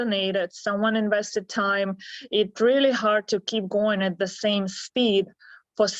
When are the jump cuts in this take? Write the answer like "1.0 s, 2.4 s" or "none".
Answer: none